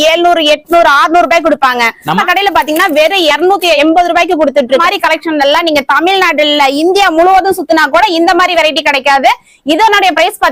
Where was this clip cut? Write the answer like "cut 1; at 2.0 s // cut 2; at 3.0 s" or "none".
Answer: cut 1; at 2.2 s // cut 2; at 3.4 s // cut 3; at 4.8 s